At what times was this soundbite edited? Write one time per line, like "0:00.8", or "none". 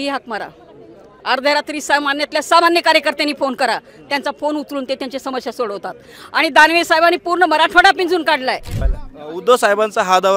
0:08.7